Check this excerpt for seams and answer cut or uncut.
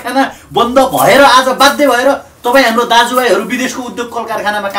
uncut